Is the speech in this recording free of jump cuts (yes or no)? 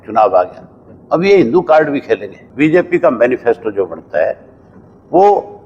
no